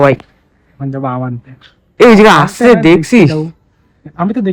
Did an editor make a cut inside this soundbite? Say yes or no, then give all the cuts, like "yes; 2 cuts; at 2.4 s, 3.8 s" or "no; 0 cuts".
no; 0 cuts